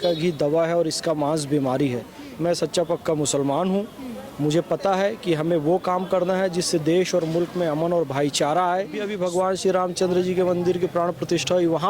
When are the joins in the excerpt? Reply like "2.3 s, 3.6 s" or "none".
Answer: 2.2 s, 9.1 s